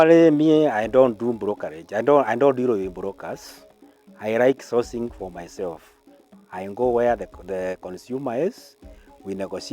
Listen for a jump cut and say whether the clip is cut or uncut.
uncut